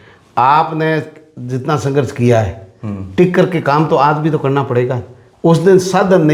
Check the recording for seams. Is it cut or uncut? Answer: uncut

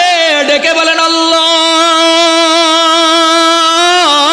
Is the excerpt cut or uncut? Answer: uncut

